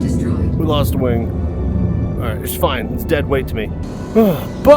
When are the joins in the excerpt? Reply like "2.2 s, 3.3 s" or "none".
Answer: 3.9 s